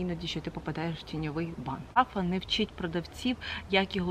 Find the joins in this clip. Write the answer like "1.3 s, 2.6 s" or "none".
2.0 s